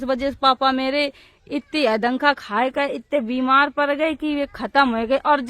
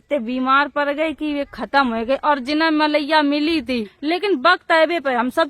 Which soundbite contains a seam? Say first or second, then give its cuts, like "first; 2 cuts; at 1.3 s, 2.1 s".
second; 1 cut; at 3.9 s